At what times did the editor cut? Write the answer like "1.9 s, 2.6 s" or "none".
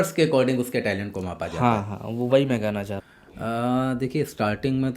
3.0 s